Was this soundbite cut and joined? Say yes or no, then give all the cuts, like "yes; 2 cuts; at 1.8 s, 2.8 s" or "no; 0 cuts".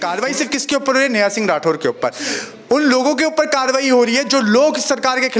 no; 0 cuts